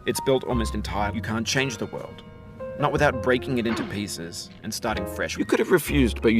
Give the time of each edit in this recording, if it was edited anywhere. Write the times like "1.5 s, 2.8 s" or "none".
1.1 s, 5.4 s